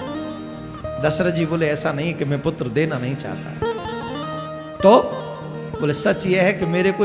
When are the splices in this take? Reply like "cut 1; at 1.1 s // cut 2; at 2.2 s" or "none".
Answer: none